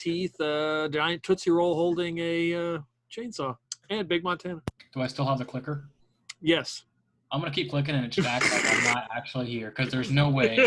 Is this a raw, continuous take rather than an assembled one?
no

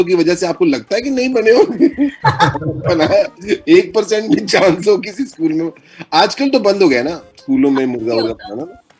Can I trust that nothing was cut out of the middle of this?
yes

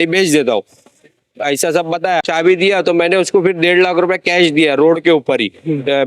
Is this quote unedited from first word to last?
no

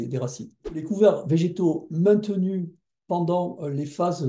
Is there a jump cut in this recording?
yes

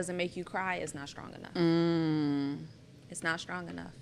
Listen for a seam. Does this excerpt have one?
no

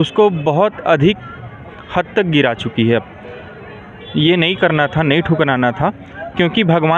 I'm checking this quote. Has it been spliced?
no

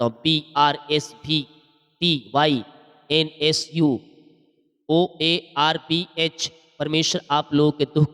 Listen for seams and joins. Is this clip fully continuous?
yes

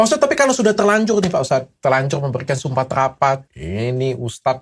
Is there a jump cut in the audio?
yes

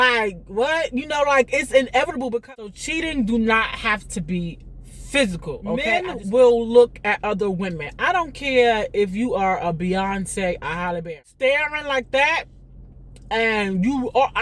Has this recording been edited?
yes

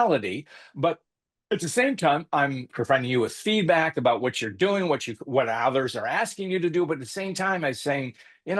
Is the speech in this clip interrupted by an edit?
yes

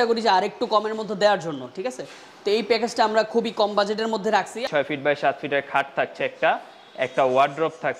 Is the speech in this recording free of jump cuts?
no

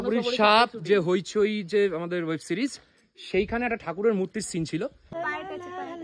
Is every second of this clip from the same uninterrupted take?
no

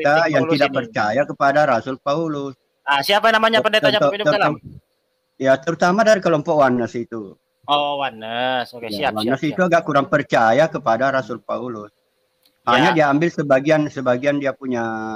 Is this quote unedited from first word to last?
yes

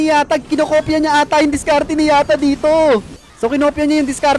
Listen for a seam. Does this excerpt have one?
yes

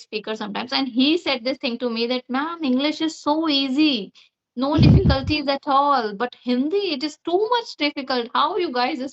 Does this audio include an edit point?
no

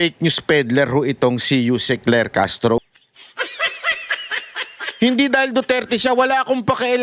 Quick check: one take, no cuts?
no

